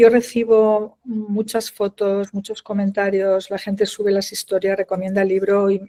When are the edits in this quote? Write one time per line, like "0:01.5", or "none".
none